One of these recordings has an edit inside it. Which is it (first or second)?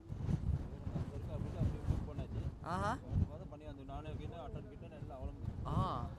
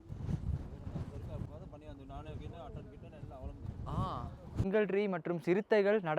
second